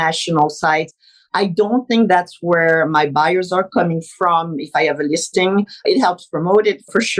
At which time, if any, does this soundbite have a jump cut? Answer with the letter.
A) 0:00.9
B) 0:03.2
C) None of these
A